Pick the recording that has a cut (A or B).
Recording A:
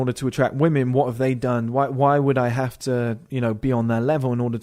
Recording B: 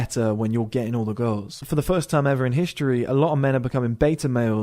B